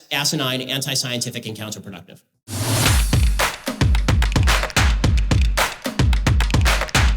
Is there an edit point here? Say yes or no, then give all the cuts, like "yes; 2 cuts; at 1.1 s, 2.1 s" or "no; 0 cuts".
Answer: yes; 1 cut; at 2.5 s